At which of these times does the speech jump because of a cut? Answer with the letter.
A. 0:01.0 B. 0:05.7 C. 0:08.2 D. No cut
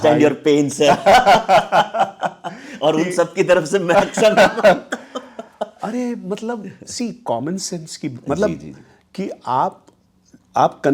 D